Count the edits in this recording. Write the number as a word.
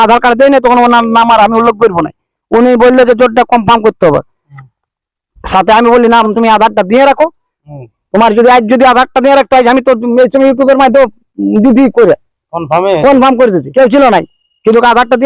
two